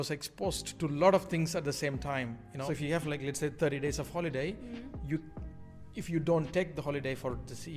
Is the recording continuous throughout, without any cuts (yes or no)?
no